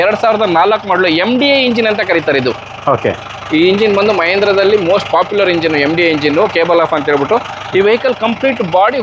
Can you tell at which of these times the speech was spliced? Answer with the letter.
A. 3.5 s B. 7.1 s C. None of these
C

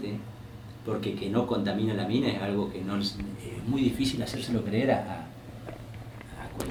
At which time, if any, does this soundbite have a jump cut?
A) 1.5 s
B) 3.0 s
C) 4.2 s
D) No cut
D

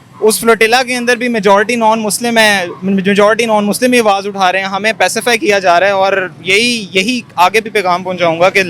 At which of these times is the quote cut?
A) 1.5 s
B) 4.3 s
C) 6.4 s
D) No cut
D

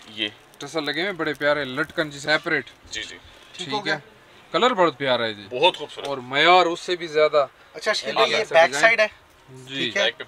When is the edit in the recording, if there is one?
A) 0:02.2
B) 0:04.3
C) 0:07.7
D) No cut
A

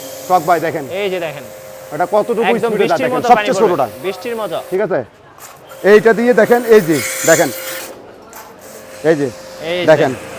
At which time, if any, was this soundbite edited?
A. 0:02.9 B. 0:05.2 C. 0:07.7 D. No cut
C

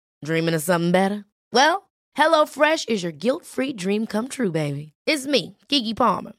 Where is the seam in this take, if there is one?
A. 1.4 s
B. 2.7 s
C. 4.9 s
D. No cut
D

